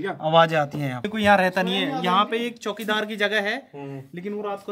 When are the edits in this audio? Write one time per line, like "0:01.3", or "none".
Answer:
0:01.1